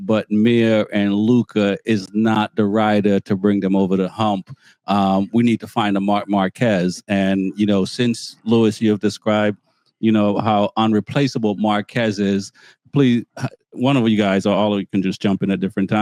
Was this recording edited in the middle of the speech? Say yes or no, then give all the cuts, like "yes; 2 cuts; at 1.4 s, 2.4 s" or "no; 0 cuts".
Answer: no; 0 cuts